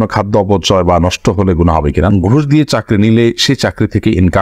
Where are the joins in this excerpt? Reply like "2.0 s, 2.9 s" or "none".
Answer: 2.1 s